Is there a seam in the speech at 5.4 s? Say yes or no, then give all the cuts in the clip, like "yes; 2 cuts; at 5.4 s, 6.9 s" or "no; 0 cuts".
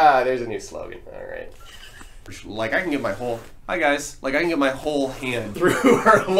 yes; 2 cuts; at 2.3 s, 5.4 s